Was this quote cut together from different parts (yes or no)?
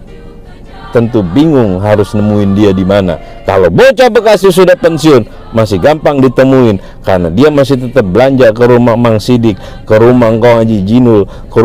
no